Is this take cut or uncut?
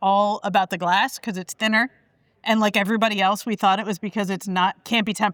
uncut